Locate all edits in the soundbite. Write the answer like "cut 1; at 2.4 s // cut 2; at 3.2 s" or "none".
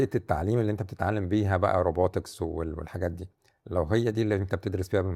none